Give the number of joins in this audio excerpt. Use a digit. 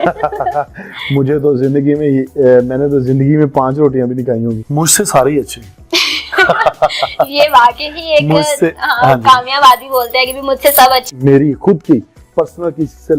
2